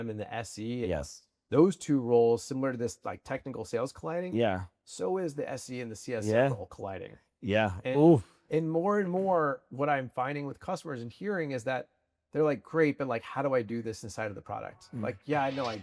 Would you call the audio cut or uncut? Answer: uncut